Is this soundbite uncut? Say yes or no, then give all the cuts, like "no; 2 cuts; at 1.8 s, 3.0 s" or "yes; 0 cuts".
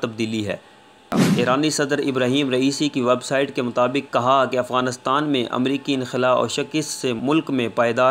no; 1 cut; at 1.2 s